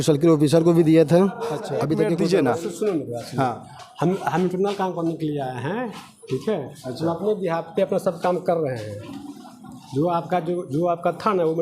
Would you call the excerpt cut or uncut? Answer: cut